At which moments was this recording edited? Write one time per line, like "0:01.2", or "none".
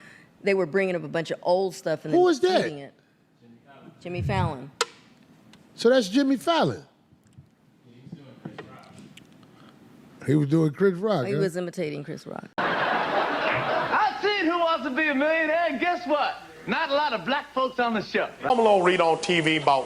0:12.5
0:18.4

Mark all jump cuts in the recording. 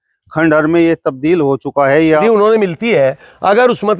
0:02.2

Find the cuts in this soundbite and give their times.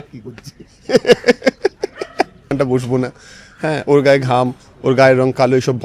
0:02.5

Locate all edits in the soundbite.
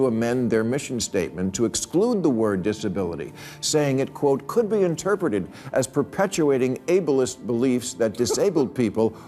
none

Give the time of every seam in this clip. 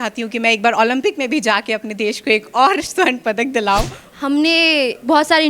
0:04.0

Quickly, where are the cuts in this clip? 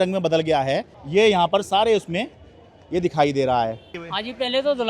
0:00.9
0:03.9

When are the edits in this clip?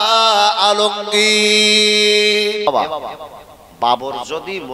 0:02.7

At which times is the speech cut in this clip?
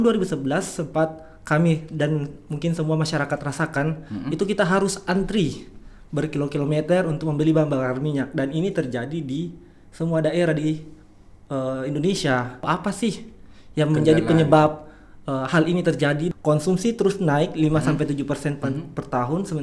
0:12.7
0:16.3

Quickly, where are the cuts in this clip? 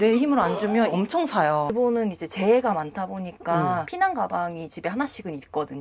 0:01.7

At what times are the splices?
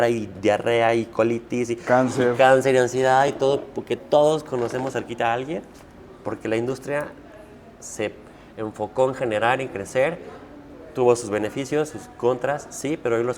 none

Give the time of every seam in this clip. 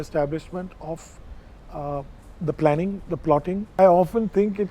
0:03.8

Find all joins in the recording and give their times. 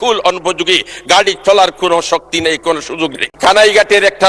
0:03.2

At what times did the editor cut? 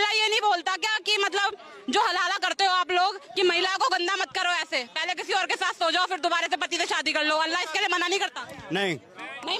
none

